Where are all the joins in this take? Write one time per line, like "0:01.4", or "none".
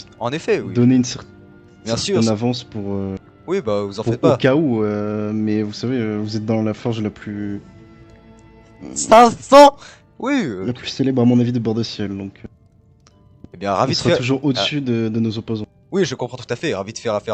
none